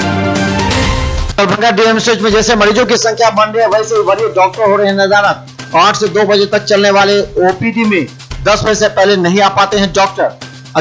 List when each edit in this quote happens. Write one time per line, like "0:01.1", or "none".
0:01.2